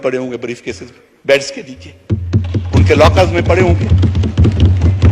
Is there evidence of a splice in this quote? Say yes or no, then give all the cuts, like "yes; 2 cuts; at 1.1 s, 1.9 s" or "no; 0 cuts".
no; 0 cuts